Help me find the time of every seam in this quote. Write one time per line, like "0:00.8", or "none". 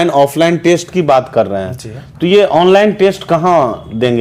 none